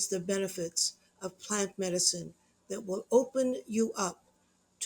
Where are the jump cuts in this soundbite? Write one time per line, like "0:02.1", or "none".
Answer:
none